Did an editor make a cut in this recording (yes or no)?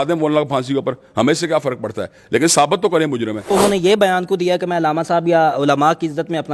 yes